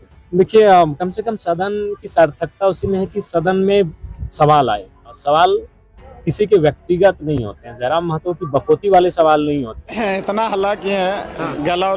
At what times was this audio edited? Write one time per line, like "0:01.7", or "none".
0:05.1
0:09.8